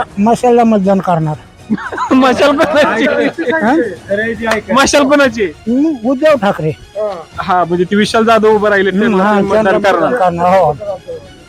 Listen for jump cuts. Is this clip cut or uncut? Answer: uncut